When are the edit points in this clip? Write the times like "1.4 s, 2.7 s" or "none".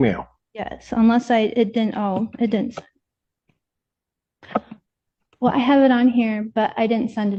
none